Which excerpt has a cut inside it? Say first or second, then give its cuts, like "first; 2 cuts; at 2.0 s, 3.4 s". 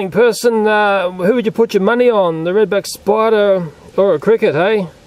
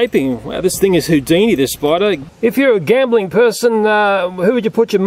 second; 1 cut; at 2.3 s